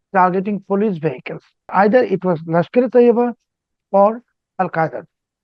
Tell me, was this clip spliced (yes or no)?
yes